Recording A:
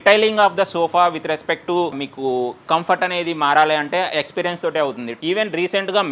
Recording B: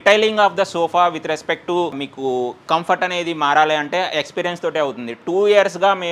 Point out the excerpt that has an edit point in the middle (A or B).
A